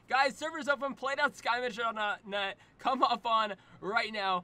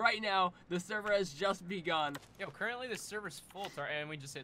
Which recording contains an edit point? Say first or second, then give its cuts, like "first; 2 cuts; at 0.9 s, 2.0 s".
second; 1 cut; at 2.3 s